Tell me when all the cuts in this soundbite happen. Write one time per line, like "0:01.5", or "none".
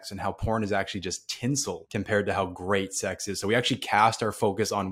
0:01.8